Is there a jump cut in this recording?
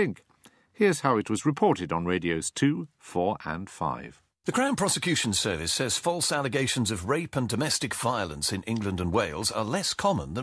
yes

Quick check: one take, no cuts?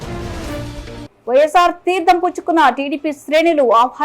no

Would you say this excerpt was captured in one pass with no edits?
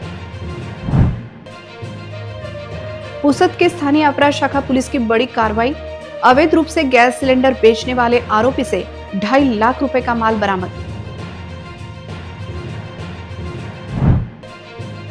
no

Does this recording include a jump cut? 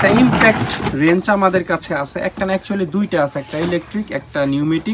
no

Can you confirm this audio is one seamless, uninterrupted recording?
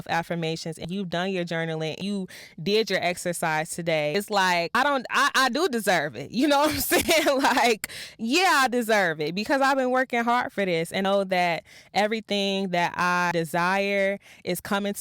no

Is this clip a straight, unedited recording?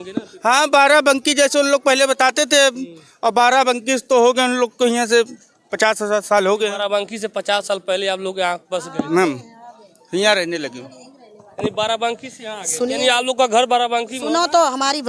yes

